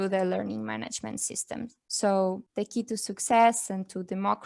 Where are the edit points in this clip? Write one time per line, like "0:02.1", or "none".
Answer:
0:01.8
0:02.4